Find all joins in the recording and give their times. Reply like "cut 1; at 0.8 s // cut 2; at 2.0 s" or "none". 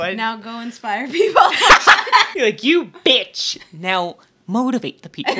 cut 1; at 2.3 s